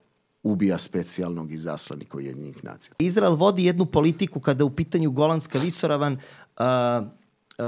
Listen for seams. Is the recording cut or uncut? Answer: cut